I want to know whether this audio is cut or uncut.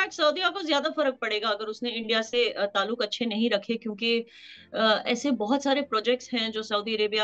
uncut